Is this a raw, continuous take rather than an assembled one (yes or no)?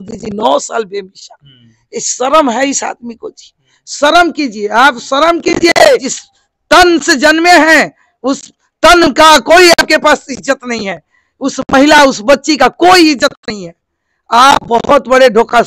no